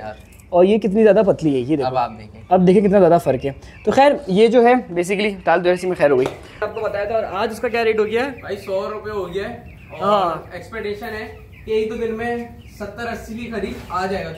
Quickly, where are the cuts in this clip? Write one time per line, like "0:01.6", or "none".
0:06.6